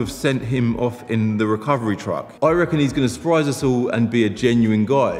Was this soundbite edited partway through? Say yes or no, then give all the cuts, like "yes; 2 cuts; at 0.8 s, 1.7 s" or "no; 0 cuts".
no; 0 cuts